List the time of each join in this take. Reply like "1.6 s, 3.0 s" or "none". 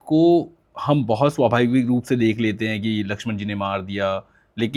none